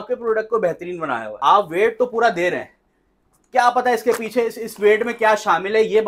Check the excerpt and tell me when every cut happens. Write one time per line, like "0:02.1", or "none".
0:01.3